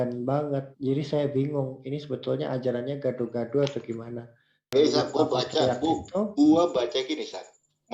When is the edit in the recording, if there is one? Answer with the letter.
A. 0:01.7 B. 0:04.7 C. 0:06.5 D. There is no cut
B